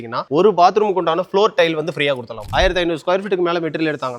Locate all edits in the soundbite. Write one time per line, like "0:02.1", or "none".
0:02.5